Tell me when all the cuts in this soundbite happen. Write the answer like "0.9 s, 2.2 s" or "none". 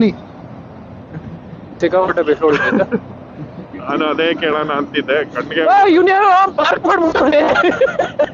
1.8 s